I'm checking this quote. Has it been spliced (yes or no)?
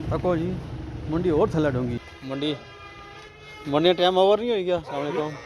yes